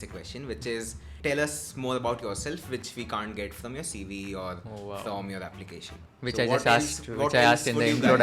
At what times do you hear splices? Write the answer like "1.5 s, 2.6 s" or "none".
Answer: 1.1 s